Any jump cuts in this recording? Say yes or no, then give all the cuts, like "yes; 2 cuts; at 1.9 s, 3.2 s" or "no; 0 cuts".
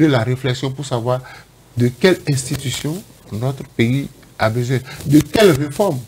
no; 0 cuts